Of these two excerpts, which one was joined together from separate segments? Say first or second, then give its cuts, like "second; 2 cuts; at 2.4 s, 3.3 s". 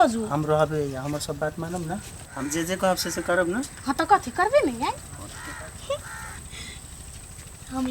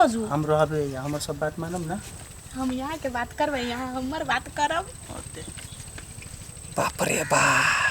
second; 1 cut; at 2.2 s